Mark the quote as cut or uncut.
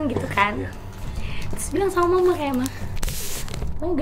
uncut